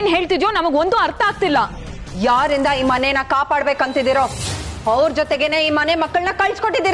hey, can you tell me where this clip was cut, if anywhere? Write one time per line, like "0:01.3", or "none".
none